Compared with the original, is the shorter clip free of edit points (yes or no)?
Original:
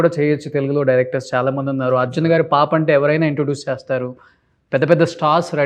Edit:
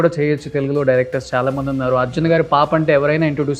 yes